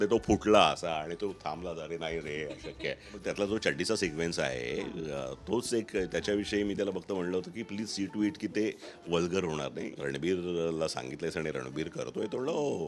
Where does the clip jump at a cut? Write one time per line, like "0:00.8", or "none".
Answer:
0:03.2
0:09.9